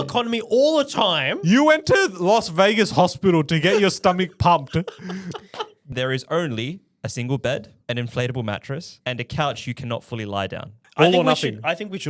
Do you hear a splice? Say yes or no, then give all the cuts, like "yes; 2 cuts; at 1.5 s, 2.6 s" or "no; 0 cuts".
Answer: yes; 4 cuts; at 5.9 s, 7.7 s, 8.9 s, 10.8 s